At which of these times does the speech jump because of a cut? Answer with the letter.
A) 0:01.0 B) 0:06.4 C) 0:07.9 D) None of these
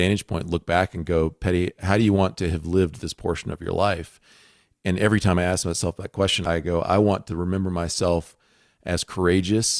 B